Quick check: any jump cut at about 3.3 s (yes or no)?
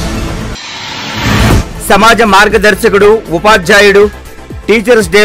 no